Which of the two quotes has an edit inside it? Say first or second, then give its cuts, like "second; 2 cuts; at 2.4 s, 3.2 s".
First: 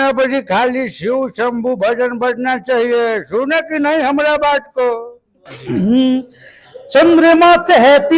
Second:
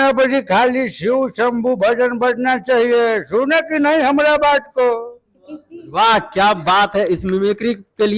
first; 1 cut; at 5.5 s